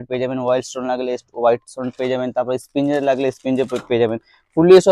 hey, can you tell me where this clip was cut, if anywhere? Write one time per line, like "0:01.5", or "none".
none